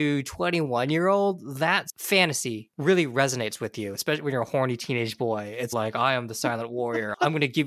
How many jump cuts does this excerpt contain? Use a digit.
1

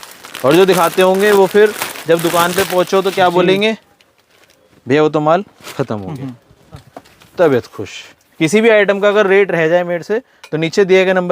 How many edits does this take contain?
1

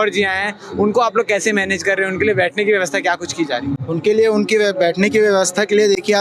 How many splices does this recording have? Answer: 0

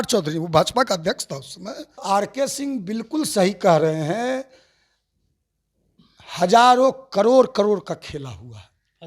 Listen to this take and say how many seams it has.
1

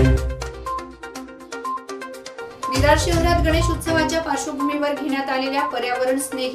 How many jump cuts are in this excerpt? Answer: 1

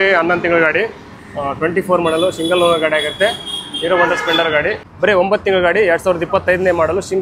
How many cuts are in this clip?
1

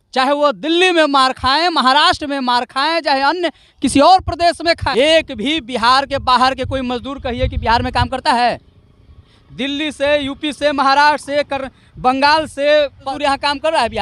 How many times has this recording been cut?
2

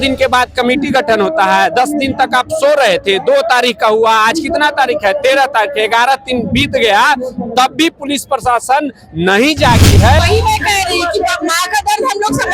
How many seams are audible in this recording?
1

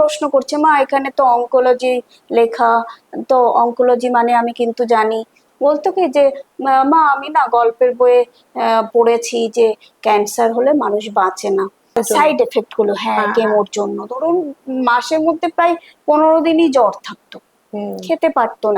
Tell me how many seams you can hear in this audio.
2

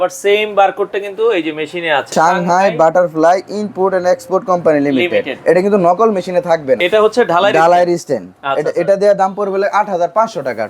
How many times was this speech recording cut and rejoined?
2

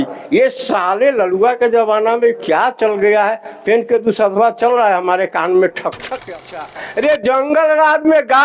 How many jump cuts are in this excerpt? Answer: 1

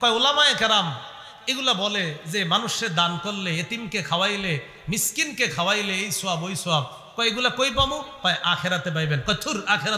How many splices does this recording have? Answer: 0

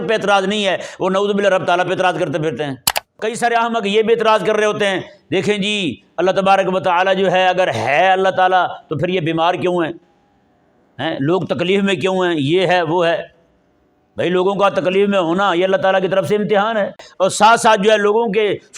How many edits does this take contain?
2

